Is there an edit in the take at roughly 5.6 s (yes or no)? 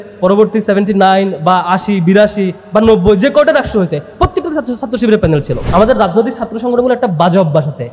yes